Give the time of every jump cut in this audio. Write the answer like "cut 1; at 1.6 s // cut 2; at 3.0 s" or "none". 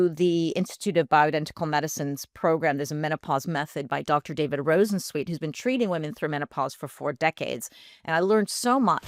none